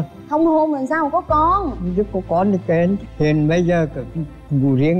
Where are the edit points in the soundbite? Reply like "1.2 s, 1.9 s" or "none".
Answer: 3.1 s

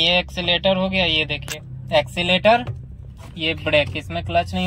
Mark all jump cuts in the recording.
none

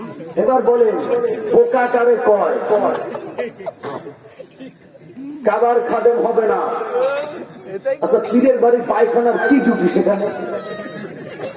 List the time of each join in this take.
none

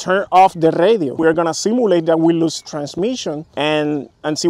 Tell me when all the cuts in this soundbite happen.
1.1 s, 3.5 s

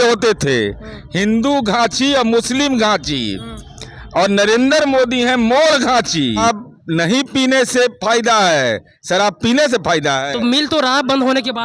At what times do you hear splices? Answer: 6.4 s

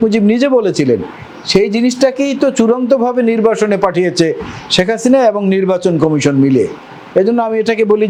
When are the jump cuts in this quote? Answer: none

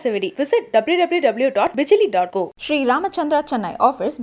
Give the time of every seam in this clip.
none

